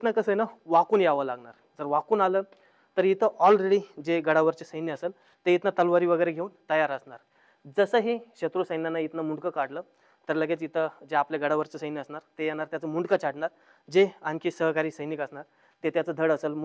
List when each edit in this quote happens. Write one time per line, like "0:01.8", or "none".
none